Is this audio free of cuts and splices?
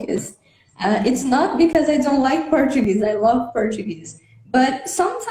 yes; 0 cuts

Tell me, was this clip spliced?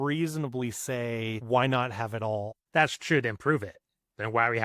yes; 2 cuts; at 1.4 s, 2.6 s

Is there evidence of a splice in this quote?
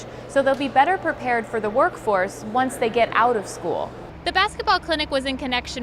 yes; 1 cut; at 4.1 s

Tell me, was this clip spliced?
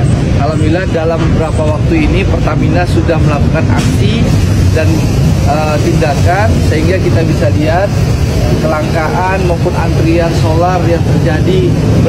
no; 0 cuts

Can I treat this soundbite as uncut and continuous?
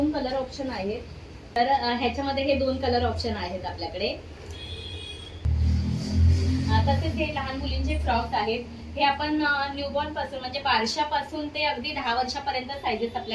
yes; 0 cuts

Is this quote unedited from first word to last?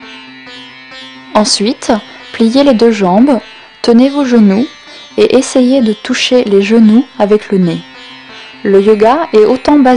no; 1 cut; at 1.3 s

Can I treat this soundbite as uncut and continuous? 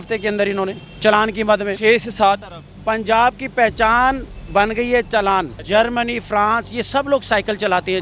no; 1 cut; at 5.6 s

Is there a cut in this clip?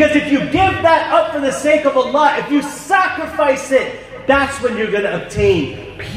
no; 0 cuts

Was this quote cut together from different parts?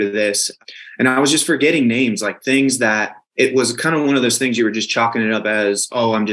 yes; 1 cut; at 3.2 s

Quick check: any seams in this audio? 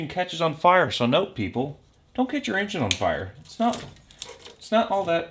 no; 0 cuts

